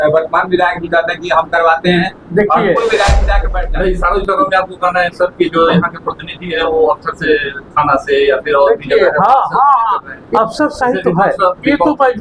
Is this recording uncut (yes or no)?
no